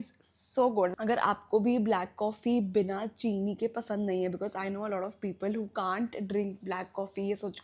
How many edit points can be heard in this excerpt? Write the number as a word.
one